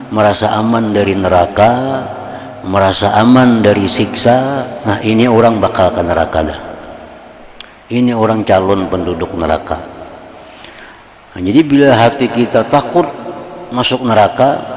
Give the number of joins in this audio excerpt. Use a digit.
0